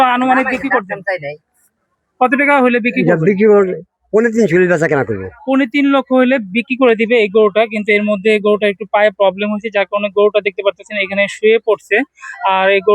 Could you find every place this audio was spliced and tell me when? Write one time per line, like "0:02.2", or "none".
none